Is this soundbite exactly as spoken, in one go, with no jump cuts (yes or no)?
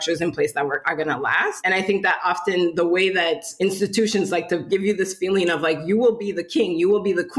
no